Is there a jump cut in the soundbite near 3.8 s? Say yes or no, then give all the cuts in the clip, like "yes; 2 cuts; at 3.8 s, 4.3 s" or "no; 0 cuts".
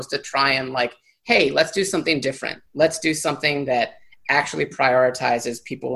no; 0 cuts